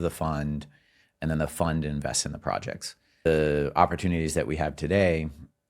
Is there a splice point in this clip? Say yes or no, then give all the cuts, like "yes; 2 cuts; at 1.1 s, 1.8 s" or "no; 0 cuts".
yes; 1 cut; at 3.3 s